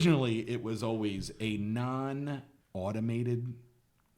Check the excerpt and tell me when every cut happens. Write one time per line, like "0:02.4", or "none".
0:02.6